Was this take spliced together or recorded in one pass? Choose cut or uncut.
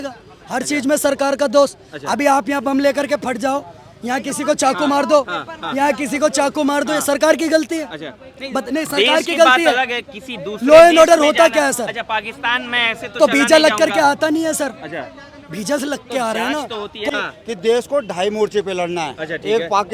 cut